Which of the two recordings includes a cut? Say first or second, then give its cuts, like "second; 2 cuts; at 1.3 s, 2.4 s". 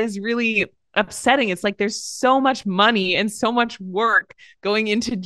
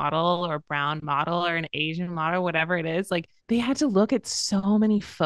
second; 1 cut; at 3.3 s